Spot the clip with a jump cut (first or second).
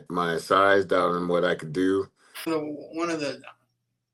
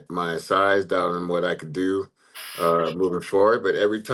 first